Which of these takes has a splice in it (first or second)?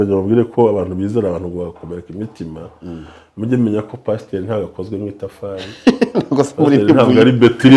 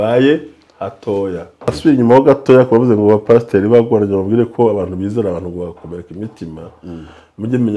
second